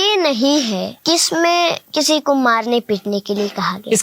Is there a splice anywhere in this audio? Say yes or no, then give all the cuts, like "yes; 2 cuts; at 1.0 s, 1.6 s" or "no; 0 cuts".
yes; 2 cuts; at 0.9 s, 1.8 s